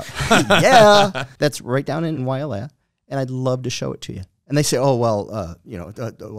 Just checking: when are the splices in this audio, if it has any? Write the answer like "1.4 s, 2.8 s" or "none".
1.2 s, 2.2 s